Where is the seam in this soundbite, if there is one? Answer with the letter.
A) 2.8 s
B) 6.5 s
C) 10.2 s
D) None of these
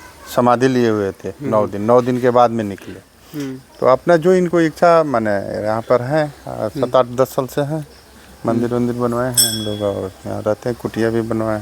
D